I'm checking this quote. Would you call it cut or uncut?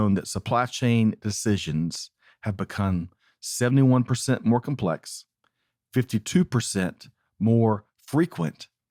uncut